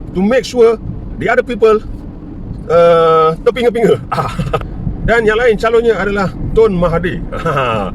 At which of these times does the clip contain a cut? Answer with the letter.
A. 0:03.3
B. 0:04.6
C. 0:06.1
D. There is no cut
B